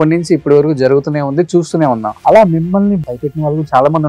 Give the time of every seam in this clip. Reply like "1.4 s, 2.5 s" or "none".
2.1 s, 3.0 s

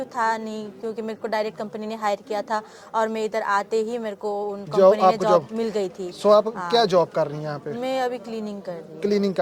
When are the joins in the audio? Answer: none

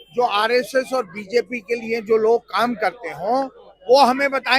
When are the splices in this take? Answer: none

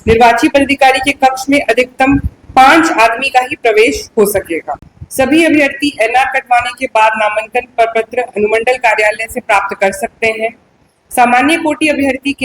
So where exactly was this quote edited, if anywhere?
4.7 s

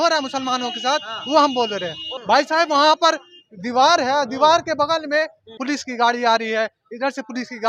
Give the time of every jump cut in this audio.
2.0 s, 5.6 s

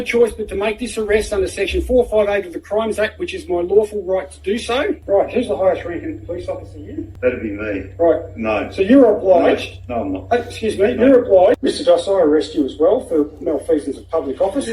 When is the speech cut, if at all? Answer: 5.0 s, 7.0 s, 11.6 s

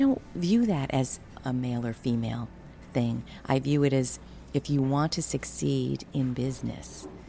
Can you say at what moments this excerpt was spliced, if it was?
1.4 s

